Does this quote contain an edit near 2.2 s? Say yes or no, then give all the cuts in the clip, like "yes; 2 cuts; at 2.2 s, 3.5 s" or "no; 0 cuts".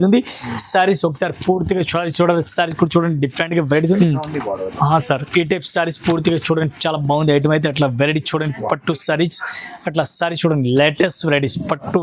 no; 1 cut; at 4.0 s